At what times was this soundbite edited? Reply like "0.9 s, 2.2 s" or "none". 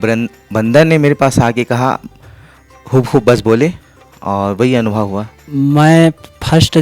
5.4 s

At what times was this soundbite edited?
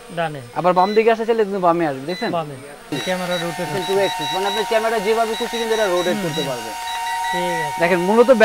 2.9 s

